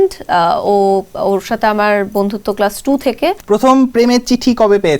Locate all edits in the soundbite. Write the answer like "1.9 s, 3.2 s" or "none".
3.4 s

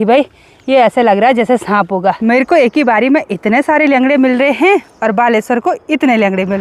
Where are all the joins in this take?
2.2 s

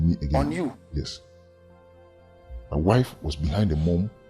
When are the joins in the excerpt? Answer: 1.1 s, 2.7 s

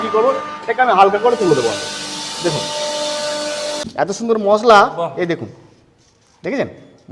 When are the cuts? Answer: 3.8 s

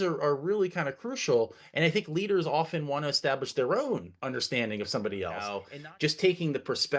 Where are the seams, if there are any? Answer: 5.6 s

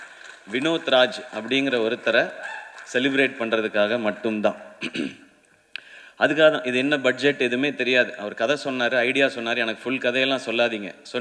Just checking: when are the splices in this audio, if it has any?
none

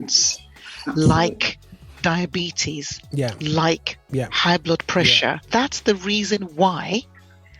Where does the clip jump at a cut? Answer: 5.4 s

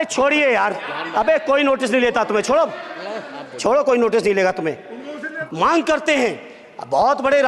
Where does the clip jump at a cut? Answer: 5.4 s

